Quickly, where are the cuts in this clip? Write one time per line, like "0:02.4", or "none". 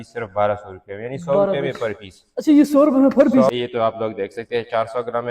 0:03.5